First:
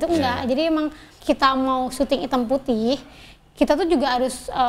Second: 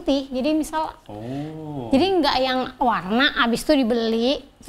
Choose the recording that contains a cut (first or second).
first